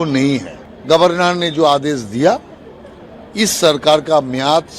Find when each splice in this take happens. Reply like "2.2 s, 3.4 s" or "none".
3.9 s